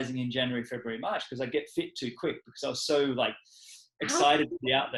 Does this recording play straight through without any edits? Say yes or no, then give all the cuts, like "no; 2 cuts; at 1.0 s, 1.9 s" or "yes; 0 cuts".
yes; 0 cuts